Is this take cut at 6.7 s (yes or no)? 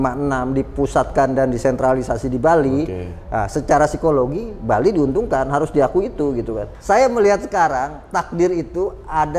yes